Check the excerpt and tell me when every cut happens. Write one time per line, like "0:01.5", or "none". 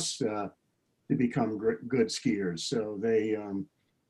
none